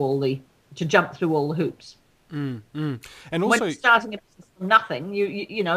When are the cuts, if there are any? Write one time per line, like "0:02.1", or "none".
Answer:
0:04.5